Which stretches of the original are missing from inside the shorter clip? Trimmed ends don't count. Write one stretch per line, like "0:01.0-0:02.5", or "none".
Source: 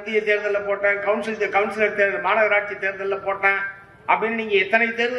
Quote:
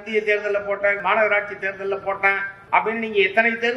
0:01.0-0:02.2
0:03.7-0:03.9

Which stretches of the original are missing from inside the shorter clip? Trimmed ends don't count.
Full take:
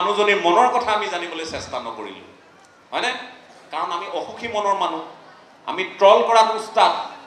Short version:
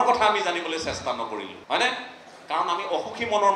0:02.2-0:02.8

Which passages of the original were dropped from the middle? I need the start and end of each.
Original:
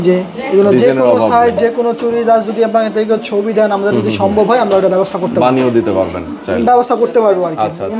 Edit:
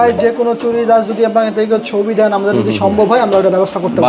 none

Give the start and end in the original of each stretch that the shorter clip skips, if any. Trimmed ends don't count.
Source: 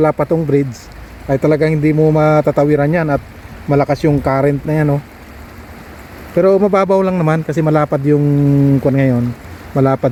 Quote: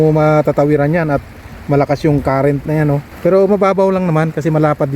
0:05.1-0:06.2

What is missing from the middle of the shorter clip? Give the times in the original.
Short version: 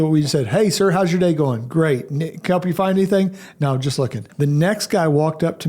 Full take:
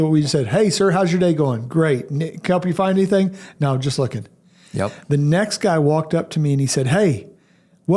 0:04.3-0:05.0

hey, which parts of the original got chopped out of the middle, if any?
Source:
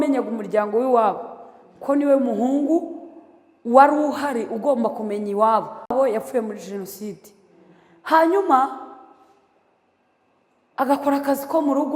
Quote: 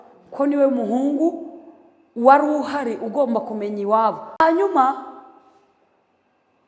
0:05.9-0:08.1

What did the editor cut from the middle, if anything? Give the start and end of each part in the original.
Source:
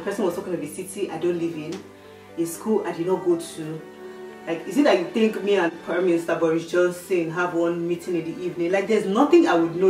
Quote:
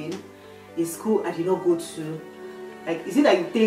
none

